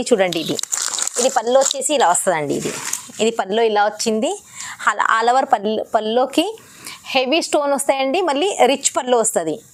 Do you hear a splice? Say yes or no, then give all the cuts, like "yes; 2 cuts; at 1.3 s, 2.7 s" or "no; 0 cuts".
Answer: no; 0 cuts